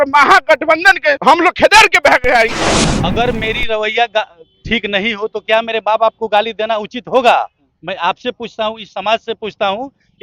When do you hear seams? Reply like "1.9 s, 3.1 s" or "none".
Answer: 1.2 s, 2.6 s